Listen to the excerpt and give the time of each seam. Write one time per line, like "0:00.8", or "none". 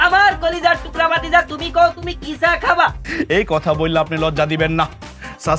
0:03.0